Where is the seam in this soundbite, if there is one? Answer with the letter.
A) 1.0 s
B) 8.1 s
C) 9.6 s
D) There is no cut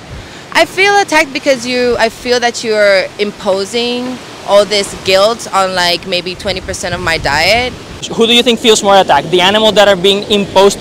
B